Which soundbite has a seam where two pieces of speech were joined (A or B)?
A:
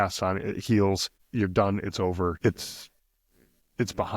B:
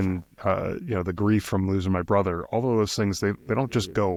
A